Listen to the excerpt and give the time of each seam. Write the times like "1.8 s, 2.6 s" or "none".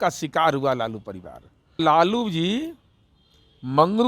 1.8 s